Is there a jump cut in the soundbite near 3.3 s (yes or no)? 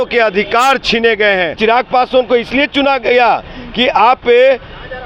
no